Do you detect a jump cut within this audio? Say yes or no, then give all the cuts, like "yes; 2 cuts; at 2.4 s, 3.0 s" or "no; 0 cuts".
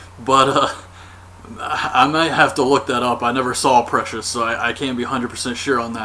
no; 0 cuts